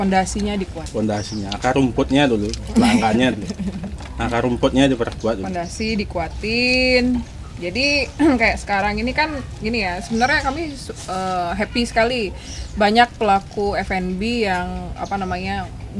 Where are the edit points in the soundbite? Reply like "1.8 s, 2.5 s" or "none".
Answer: none